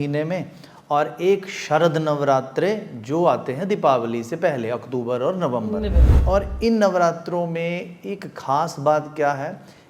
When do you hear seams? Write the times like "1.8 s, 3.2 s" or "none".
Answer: 6.1 s